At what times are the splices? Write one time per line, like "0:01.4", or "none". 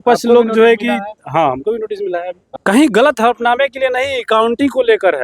0:02.5